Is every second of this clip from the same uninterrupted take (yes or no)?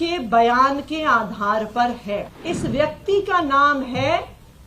no